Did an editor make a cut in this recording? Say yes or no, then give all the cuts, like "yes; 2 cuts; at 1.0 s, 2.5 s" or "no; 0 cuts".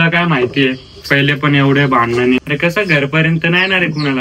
yes; 1 cut; at 2.4 s